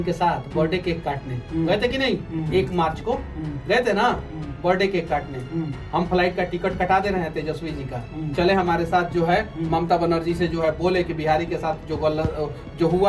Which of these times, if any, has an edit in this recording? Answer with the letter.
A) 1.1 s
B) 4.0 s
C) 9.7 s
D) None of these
D